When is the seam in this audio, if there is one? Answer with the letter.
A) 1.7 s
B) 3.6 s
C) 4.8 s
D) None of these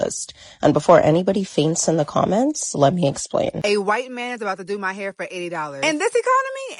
B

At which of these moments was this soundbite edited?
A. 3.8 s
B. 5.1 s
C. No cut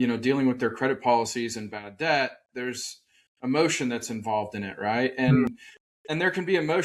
C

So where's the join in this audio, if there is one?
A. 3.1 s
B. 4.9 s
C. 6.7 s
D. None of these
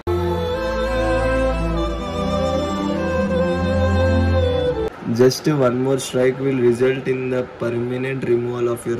B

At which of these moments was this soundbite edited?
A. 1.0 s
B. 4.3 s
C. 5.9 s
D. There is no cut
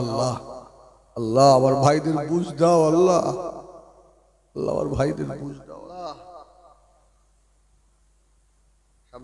C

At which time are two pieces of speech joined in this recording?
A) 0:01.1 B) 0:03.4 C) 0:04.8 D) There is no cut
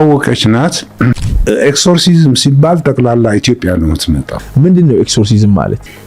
A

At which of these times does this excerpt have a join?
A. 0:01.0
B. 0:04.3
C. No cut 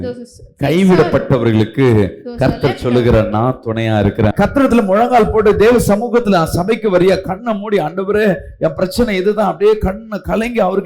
B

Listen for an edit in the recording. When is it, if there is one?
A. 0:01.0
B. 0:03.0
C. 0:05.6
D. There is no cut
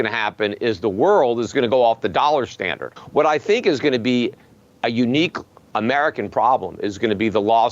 B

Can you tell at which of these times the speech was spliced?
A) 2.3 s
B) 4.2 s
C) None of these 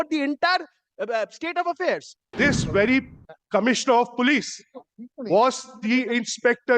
A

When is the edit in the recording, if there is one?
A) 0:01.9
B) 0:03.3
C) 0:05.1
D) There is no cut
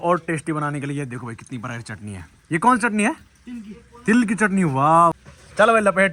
D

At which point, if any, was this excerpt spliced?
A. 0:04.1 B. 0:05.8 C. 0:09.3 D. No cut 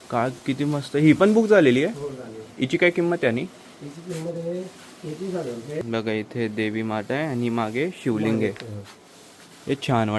B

